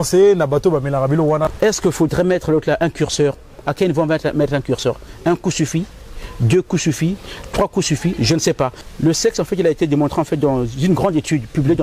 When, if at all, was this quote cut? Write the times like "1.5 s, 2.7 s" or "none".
1.5 s, 8.8 s